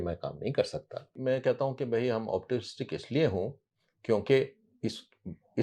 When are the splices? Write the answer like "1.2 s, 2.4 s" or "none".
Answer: 1.2 s